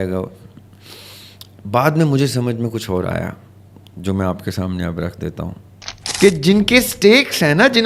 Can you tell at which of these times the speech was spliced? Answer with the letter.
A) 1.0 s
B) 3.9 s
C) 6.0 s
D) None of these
C